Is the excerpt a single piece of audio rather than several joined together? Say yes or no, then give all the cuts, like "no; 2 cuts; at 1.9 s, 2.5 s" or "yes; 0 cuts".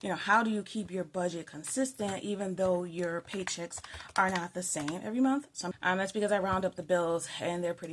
no; 1 cut; at 5.6 s